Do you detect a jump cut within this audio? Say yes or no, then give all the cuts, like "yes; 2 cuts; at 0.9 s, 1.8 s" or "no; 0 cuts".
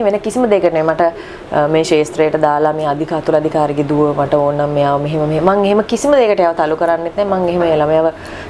no; 0 cuts